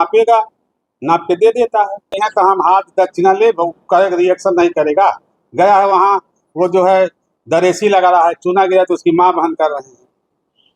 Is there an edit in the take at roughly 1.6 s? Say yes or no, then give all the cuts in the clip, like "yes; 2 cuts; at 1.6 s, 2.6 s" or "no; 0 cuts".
no; 0 cuts